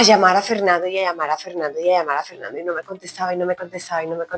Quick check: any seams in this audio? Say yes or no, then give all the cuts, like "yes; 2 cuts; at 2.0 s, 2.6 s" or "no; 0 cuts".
no; 0 cuts